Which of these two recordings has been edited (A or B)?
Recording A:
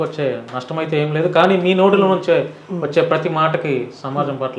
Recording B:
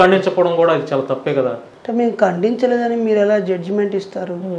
B